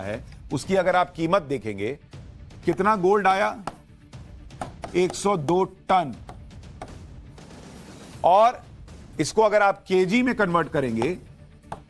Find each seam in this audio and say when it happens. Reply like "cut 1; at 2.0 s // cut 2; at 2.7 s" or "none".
none